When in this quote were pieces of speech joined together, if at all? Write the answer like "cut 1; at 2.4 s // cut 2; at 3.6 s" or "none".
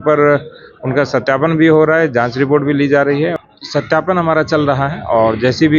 cut 1; at 3.3 s